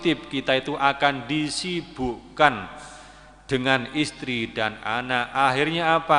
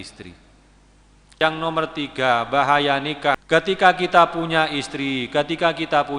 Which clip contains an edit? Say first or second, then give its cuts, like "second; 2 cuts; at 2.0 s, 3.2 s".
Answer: second; 2 cuts; at 1.3 s, 3.4 s